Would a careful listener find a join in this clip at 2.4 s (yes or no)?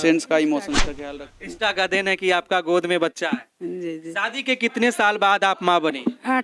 no